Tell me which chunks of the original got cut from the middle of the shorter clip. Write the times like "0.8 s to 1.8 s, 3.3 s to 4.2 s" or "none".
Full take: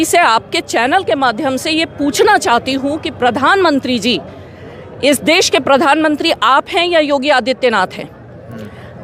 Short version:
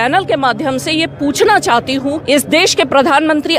3.0 s to 4.9 s